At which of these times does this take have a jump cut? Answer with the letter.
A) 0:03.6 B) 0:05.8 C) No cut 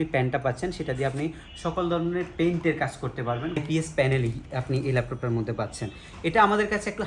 A